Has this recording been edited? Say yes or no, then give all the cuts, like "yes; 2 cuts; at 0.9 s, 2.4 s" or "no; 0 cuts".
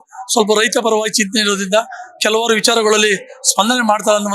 no; 0 cuts